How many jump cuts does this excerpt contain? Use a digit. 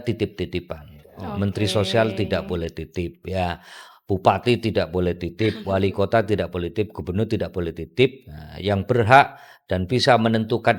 0